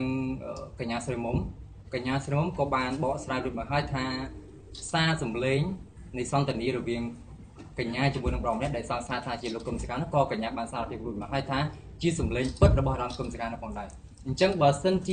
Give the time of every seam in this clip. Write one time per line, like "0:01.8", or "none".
0:14.2